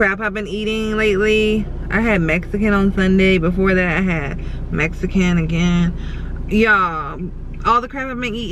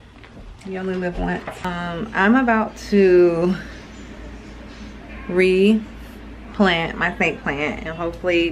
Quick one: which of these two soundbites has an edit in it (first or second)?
second